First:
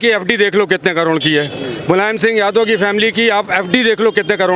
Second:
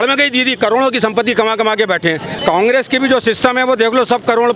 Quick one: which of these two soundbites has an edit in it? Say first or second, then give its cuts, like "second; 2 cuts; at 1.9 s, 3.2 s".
second; 1 cut; at 2.3 s